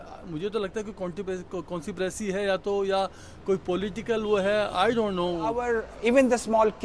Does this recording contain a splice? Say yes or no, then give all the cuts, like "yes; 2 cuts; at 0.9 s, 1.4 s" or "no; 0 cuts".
yes; 1 cut; at 5.7 s